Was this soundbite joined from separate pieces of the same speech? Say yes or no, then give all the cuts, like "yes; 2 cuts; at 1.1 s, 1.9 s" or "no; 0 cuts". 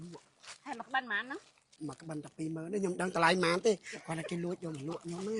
yes; 1 cut; at 1.6 s